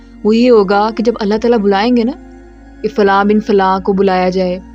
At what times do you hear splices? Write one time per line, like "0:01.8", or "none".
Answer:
none